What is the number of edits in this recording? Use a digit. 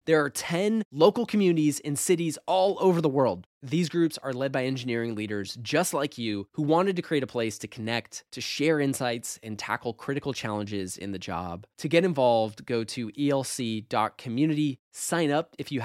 0